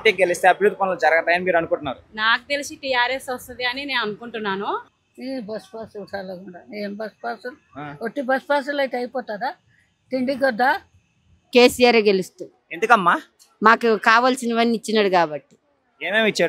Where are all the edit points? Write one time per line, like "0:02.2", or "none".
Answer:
0:04.9
0:11.3